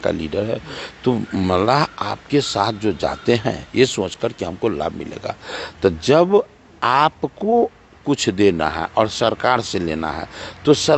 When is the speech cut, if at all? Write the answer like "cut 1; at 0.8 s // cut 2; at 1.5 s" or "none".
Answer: none